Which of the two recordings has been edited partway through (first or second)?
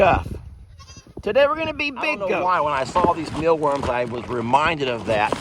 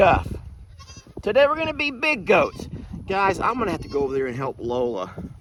first